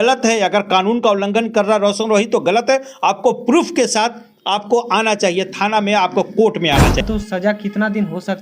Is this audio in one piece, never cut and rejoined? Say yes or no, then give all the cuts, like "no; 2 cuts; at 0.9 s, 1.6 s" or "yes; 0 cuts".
no; 1 cut; at 7.0 s